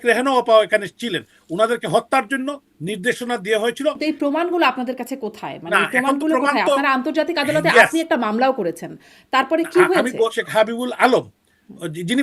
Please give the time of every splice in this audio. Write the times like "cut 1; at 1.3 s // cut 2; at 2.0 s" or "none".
cut 1; at 4.0 s // cut 2; at 10.4 s